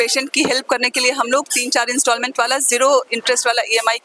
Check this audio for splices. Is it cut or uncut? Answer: uncut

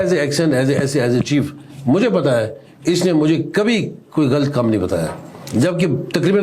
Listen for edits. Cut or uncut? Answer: uncut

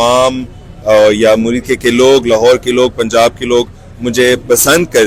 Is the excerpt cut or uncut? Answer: uncut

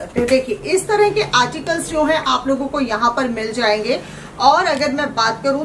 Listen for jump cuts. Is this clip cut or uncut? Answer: uncut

